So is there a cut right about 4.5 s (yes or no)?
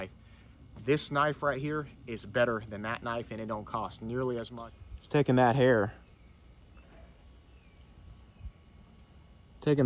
yes